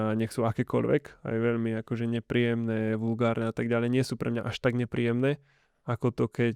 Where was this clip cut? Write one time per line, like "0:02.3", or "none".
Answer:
none